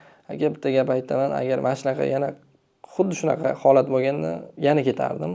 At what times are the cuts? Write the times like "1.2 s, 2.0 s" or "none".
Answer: 4.4 s